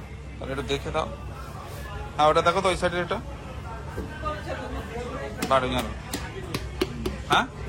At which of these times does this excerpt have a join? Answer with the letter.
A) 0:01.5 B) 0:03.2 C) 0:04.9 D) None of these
D